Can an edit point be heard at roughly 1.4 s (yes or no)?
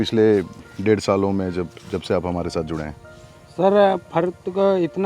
no